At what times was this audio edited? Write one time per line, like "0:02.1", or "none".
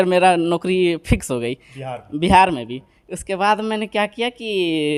none